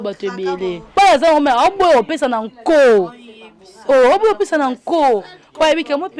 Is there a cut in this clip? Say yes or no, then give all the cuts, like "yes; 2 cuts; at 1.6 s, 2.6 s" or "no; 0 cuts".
yes; 1 cut; at 0.9 s